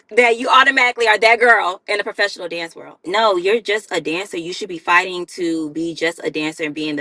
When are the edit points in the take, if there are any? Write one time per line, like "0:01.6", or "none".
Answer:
0:03.0